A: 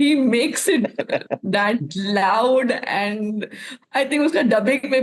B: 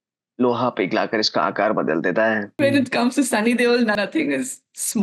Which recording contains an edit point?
B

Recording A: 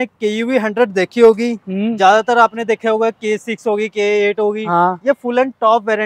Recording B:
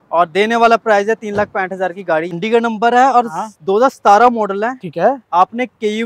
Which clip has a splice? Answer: B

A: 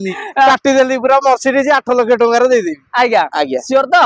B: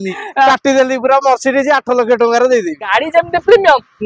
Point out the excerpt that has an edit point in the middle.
B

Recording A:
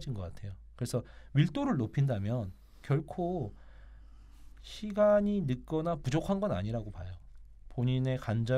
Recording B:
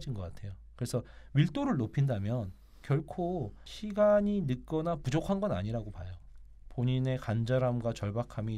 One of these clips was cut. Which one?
B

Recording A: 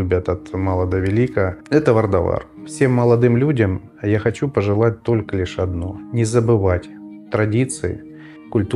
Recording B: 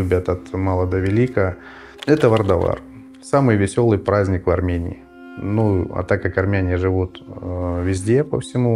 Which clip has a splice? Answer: A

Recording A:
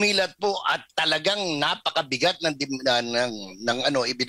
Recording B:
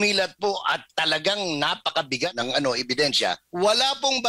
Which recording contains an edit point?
B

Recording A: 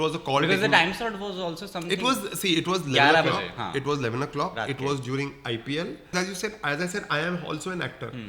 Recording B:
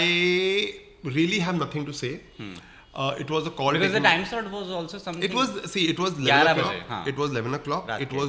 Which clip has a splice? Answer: A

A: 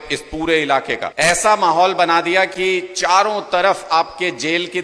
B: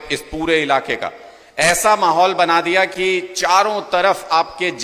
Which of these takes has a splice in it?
A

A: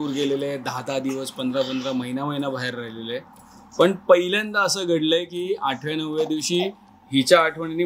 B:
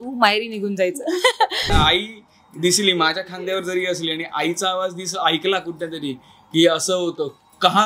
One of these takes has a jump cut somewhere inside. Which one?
B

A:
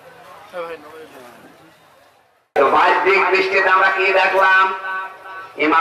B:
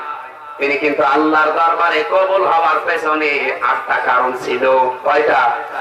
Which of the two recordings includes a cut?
A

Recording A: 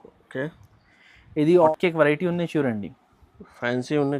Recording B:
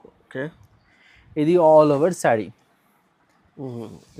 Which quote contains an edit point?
A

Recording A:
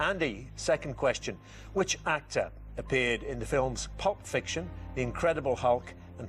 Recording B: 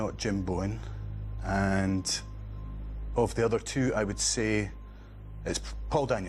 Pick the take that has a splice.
A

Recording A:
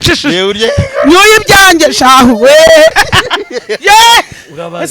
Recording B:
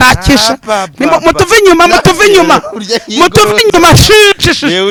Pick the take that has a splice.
A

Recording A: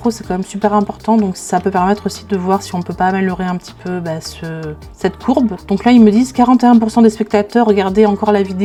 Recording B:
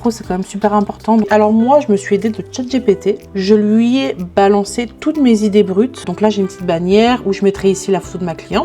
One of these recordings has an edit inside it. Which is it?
B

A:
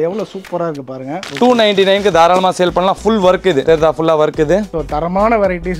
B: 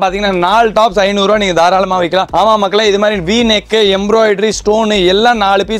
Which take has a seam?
A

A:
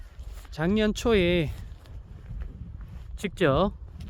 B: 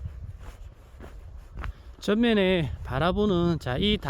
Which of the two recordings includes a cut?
B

